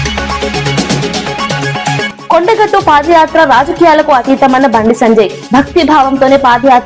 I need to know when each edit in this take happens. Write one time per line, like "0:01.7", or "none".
0:02.1